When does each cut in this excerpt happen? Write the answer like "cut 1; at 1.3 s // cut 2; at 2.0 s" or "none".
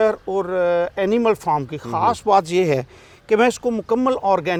none

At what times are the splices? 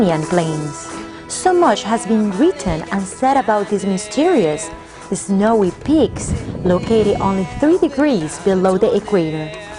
cut 1; at 1.7 s

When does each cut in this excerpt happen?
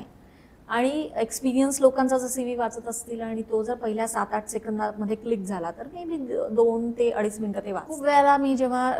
cut 1; at 7.9 s

